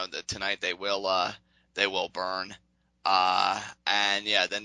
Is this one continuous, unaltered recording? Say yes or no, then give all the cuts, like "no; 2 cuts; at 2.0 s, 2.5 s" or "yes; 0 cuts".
yes; 0 cuts